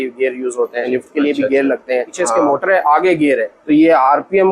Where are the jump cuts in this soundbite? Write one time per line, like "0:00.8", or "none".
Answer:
0:00.9
0:02.1
0:03.6